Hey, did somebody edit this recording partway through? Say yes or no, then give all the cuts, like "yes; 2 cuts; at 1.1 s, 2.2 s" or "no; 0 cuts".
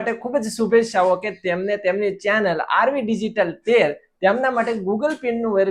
no; 0 cuts